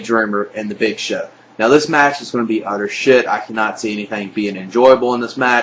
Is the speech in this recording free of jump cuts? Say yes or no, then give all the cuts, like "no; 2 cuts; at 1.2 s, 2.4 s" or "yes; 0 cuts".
yes; 0 cuts